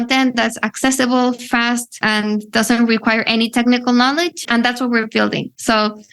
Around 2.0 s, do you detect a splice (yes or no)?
yes